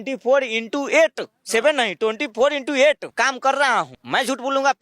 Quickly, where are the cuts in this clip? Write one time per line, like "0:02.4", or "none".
0:03.1
0:04.0